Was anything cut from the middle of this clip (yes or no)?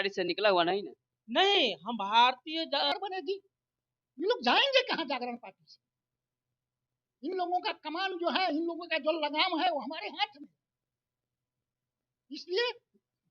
yes